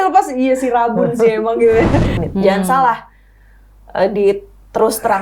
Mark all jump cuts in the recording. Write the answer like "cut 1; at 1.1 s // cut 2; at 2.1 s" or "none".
cut 1; at 2.2 s